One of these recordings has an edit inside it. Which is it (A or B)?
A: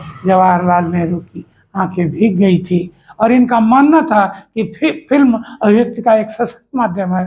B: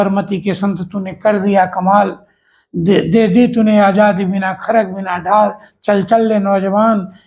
A